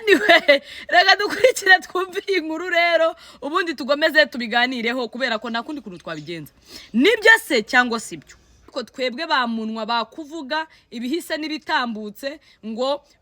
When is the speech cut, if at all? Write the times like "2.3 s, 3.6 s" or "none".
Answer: 8.7 s